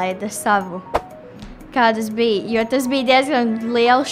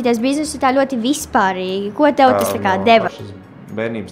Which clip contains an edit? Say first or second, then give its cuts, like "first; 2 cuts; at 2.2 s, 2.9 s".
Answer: second; 1 cut; at 3.1 s